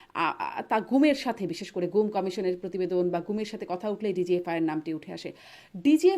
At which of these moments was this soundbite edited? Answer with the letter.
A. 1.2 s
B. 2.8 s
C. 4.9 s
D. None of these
D